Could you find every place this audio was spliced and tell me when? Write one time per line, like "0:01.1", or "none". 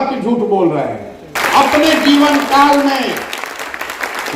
0:01.4